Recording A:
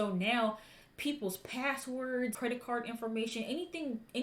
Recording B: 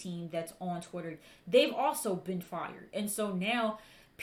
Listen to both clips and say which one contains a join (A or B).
A